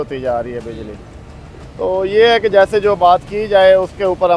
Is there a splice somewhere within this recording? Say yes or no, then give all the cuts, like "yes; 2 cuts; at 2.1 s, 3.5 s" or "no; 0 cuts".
no; 0 cuts